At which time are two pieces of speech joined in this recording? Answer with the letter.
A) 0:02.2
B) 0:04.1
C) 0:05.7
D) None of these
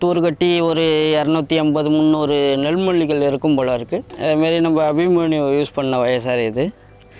B